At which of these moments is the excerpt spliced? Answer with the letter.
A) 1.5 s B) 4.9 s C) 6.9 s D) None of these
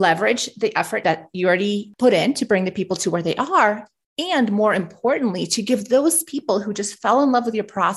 A